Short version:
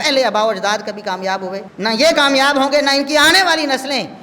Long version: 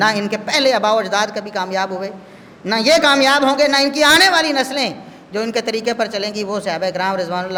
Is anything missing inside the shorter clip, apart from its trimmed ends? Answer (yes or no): yes